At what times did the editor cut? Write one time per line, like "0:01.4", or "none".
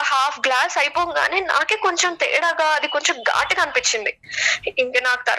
0:04.2